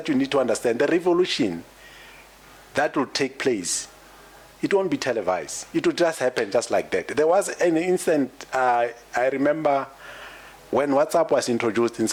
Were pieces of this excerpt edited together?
no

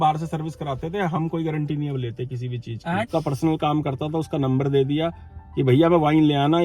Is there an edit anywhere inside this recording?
yes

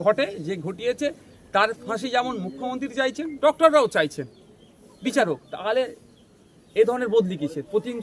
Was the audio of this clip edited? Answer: no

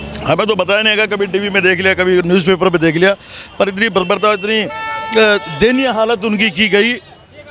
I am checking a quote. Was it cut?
no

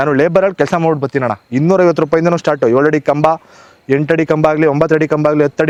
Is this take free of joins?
yes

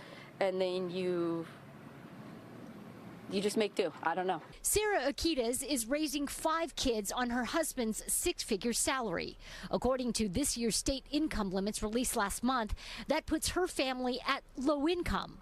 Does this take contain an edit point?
yes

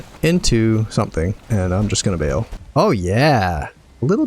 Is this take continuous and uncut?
no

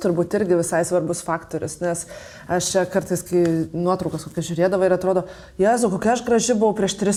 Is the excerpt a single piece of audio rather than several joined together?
yes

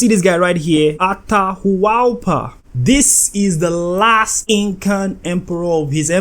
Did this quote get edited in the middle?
yes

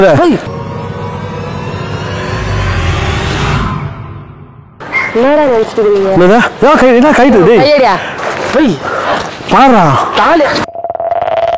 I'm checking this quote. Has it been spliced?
yes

